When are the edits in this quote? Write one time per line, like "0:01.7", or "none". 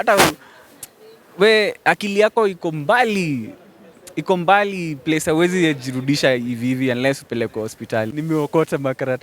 0:08.1